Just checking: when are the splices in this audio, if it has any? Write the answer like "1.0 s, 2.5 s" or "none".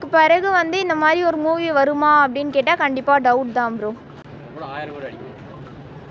none

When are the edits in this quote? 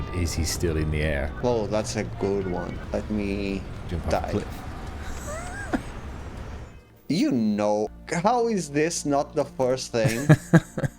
1.3 s, 2.8 s, 7.9 s

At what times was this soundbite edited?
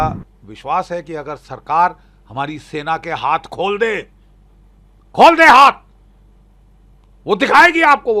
none

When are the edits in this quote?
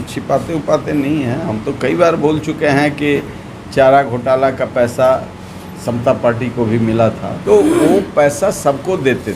7.3 s

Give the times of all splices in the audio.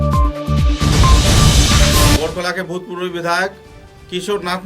2.2 s

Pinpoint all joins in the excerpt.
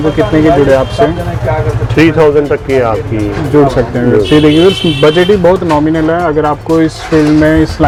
none

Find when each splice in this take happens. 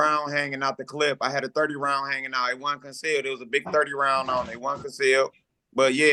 none

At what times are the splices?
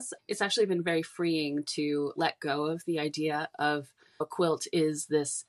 4.3 s

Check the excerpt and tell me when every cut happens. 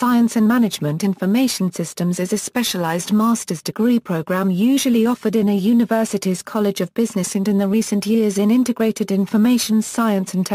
none

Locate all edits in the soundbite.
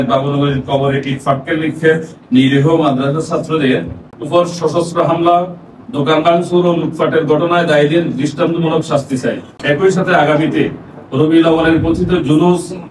9.5 s

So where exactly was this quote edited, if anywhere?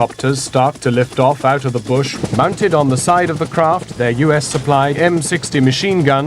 2.1 s, 3.9 s, 5.0 s

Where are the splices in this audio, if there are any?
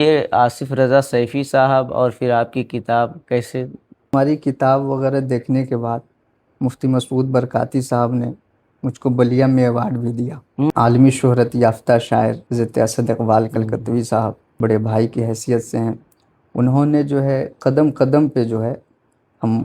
4.1 s, 10.7 s, 12.4 s, 14.4 s

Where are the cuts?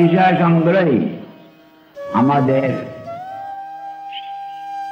3.1 s

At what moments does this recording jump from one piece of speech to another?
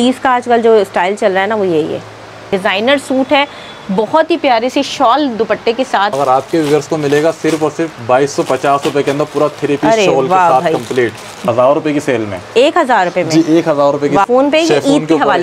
2.5 s, 6.1 s, 11.4 s, 14.2 s

